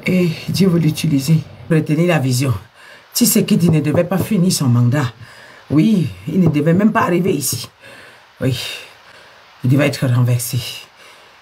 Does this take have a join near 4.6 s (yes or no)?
no